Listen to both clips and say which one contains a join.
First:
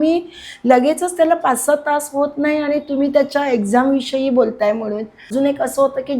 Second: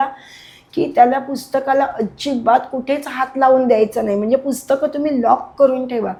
first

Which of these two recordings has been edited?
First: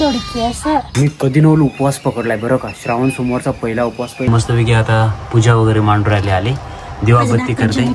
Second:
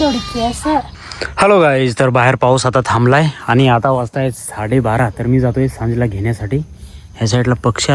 first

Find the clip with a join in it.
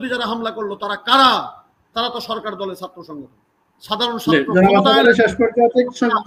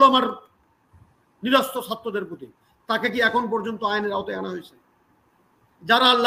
first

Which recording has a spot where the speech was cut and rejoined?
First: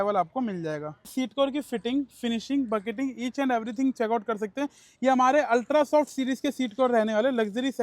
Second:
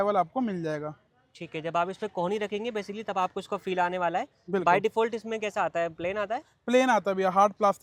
first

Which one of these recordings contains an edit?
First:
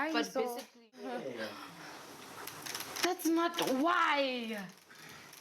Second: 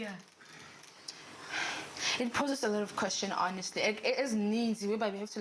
first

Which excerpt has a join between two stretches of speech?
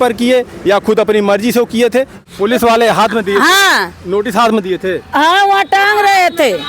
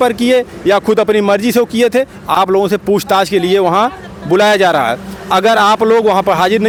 first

